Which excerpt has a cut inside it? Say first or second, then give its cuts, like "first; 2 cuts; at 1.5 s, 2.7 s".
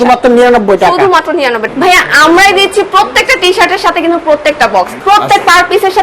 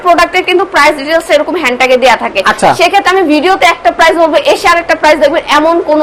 first; 2 cuts; at 1.6 s, 4.9 s